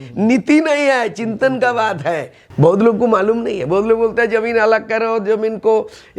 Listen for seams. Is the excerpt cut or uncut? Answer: cut